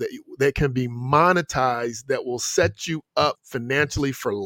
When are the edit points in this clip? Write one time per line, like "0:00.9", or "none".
none